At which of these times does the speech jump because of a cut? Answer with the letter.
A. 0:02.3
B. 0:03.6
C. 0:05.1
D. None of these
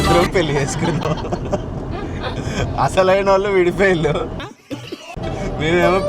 C